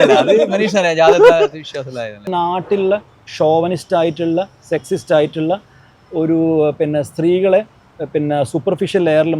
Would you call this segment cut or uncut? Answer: cut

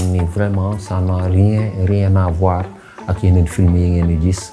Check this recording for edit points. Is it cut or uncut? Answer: uncut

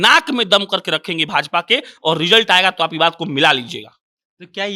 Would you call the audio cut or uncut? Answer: uncut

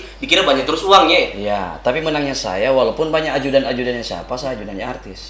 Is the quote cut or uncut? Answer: uncut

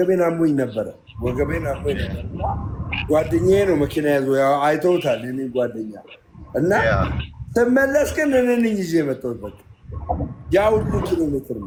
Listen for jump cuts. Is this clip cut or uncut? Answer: uncut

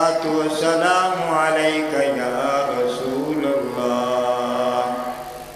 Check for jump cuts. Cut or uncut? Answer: cut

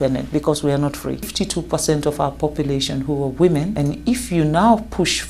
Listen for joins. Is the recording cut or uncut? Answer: cut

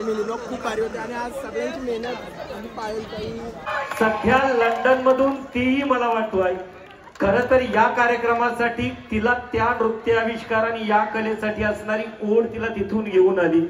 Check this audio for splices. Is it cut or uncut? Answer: cut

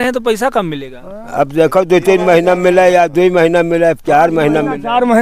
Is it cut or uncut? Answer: uncut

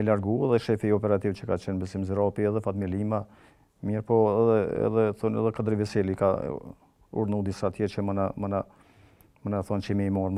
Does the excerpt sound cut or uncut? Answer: uncut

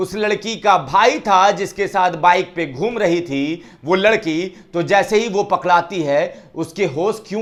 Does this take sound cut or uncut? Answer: uncut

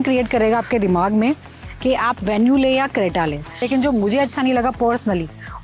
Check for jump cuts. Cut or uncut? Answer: cut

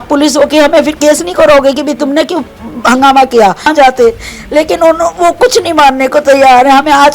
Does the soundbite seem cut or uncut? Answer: cut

